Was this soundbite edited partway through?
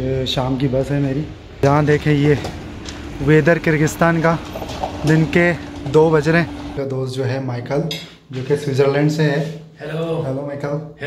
yes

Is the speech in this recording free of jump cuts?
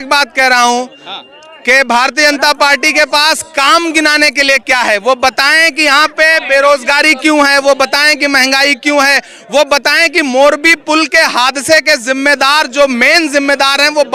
yes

